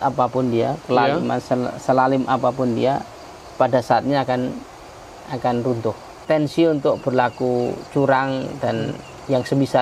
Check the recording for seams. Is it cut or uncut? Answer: cut